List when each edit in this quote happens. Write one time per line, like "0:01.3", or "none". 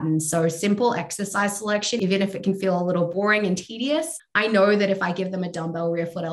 0:02.0
0:03.1
0:04.2

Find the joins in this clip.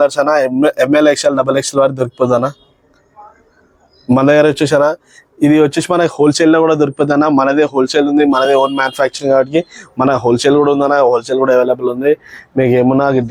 none

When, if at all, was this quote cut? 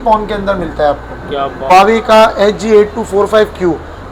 0:01.7

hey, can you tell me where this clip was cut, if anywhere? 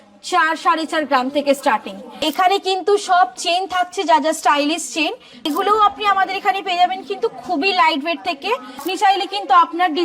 0:02.3
0:05.4
0:08.8

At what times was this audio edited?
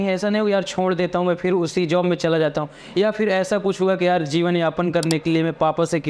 none

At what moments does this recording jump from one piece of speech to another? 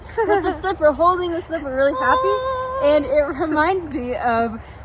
none

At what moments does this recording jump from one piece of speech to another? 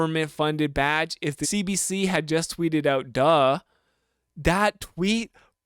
0:01.4

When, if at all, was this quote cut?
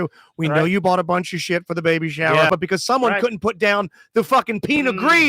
0:02.5

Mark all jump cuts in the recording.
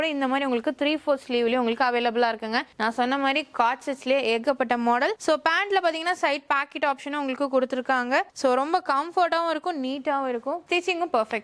none

